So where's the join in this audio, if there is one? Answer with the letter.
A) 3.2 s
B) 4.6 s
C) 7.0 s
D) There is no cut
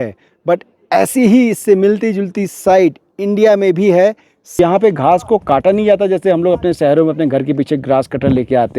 B